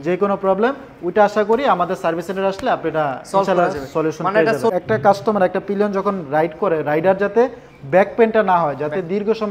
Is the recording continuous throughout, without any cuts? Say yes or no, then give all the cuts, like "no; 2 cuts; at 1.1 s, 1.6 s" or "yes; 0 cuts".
no; 1 cut; at 4.7 s